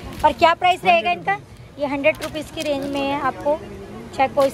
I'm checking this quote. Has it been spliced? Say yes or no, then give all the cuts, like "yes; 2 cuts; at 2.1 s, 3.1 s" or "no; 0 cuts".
no; 0 cuts